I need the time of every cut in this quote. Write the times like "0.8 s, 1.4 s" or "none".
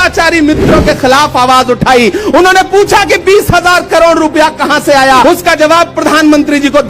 5.2 s